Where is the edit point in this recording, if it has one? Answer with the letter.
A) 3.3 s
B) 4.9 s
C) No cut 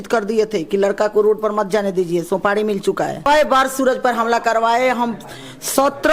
A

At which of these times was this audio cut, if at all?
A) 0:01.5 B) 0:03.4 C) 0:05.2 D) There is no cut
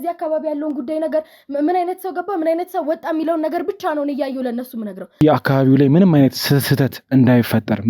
C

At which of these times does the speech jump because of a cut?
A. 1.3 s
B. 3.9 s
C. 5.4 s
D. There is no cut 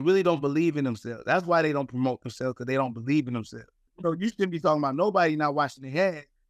B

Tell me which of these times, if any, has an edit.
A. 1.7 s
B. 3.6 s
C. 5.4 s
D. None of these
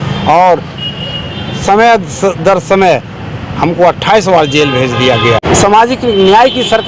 C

